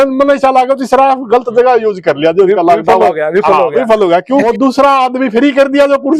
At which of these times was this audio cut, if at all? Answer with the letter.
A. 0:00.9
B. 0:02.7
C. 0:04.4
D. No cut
C